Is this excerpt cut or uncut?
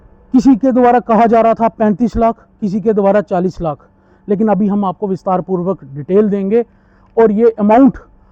uncut